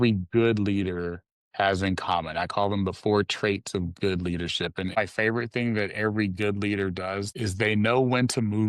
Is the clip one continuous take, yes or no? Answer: no